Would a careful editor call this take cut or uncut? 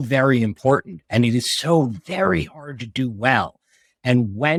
uncut